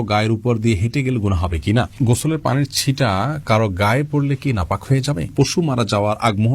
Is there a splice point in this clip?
yes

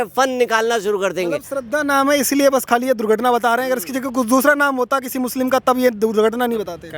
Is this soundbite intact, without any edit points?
yes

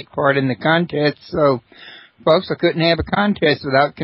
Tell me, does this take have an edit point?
yes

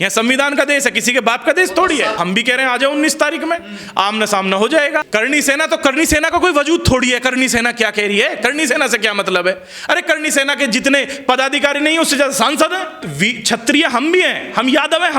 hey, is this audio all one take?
no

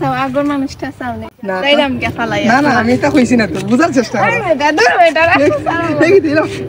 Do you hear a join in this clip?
yes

